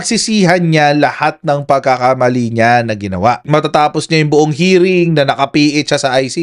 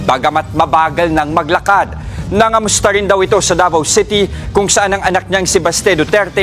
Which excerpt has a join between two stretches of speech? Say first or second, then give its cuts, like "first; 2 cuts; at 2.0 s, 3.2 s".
first; 1 cut; at 3.4 s